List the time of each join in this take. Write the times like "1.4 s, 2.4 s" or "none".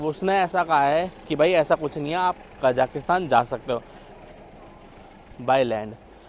none